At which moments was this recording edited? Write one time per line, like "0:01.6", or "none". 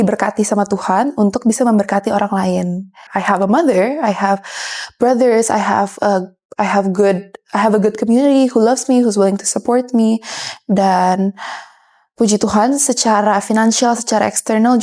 0:03.1

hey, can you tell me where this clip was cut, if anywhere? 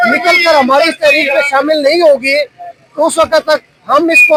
none

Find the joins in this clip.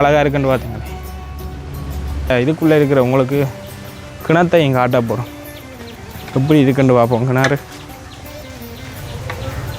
0:02.3

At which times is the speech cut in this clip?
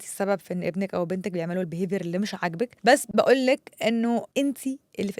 0:03.0
0:04.3

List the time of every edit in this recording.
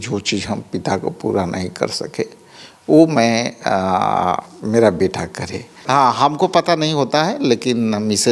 0:05.7

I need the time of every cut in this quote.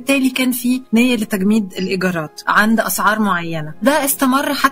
0:00.8
0:02.3
0:03.8

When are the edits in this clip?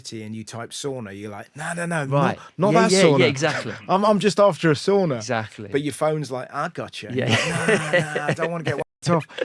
none

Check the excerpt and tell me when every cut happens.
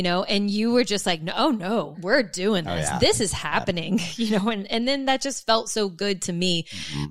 0:02.0

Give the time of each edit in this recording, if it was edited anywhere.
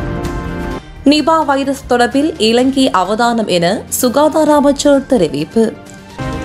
0:01.0

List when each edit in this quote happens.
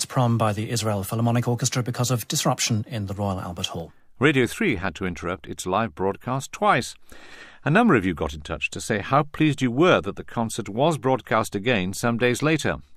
none

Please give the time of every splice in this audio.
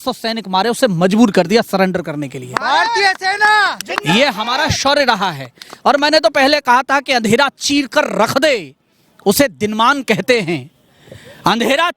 none

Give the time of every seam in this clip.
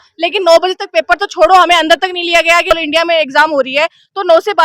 0:02.7

